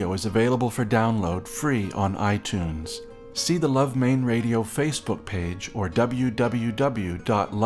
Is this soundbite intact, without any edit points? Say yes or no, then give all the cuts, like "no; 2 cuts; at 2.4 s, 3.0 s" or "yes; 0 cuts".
yes; 0 cuts